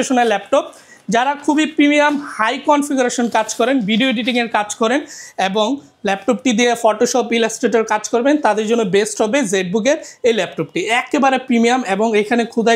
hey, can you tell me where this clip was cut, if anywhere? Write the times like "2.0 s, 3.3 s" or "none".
none